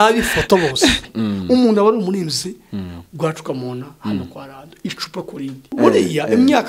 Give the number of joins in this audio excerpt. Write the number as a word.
two